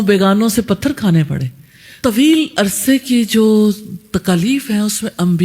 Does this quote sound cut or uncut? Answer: cut